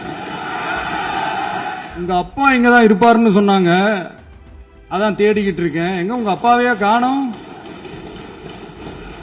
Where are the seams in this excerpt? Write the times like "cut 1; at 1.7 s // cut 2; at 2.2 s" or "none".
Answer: cut 1; at 1.8 s // cut 2; at 7.7 s